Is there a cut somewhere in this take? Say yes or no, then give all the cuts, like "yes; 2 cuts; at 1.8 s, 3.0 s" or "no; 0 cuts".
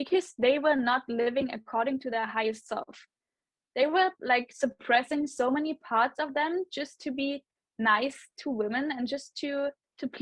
no; 0 cuts